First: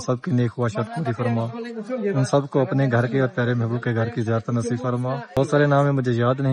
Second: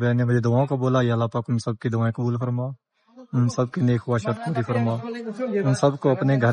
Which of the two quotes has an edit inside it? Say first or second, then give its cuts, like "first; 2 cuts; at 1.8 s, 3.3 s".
first; 1 cut; at 5.4 s